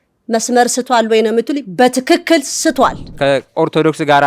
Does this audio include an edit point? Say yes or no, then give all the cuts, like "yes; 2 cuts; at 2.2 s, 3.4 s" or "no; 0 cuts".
yes; 1 cut; at 3.1 s